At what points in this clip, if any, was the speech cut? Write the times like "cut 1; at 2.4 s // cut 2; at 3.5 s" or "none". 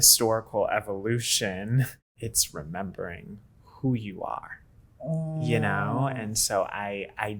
cut 1; at 2.1 s